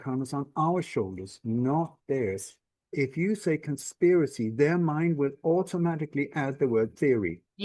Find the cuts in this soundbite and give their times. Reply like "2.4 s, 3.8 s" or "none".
2.8 s

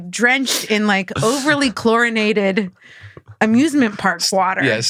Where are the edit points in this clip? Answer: none

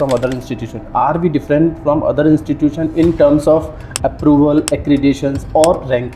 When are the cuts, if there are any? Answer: none

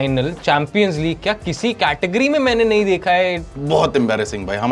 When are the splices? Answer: 3.4 s

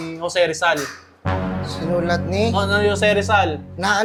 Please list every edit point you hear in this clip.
none

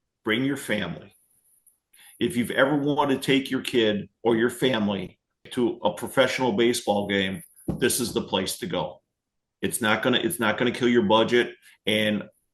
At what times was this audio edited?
2.0 s, 5.4 s

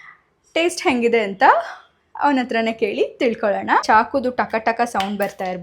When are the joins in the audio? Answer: 3.8 s

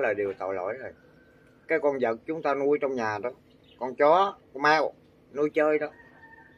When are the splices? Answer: none

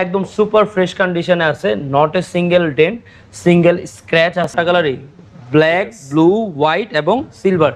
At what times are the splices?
4.5 s

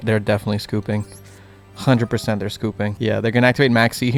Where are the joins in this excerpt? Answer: 2.9 s

